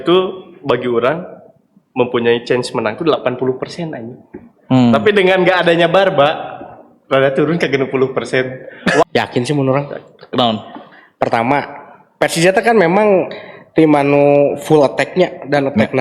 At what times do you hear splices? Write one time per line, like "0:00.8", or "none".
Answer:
0:09.0